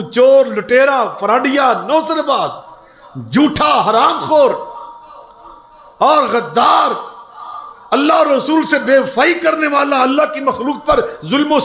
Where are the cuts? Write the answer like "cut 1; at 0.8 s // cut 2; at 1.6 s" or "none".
none